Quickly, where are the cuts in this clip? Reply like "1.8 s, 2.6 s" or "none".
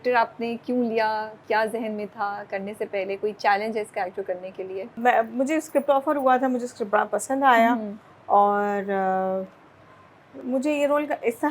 none